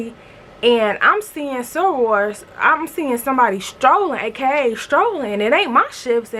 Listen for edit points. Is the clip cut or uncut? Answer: uncut